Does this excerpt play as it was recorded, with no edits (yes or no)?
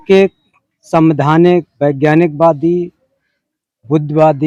yes